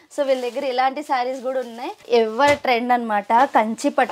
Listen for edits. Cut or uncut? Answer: cut